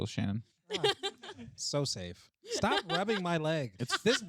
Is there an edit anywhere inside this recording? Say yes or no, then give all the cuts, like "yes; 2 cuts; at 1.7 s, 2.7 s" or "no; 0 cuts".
no; 0 cuts